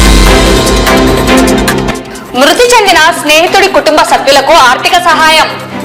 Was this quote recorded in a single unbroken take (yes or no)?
yes